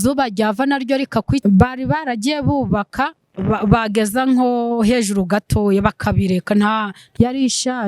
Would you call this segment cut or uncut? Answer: cut